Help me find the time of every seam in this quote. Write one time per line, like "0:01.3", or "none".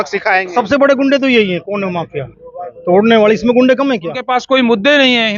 0:04.2